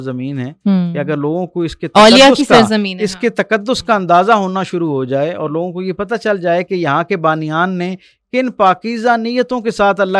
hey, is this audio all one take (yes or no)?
yes